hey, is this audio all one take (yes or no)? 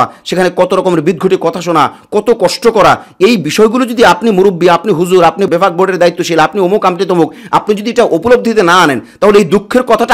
yes